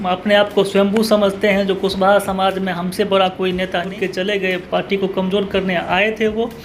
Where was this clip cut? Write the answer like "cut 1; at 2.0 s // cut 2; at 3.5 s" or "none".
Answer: cut 1; at 3.9 s